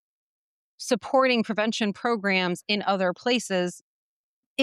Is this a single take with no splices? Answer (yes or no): yes